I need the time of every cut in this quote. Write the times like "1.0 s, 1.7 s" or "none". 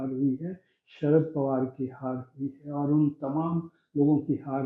none